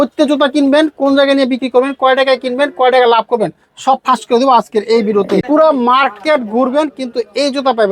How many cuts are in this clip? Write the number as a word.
one